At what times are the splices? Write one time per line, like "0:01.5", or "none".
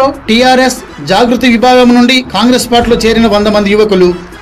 none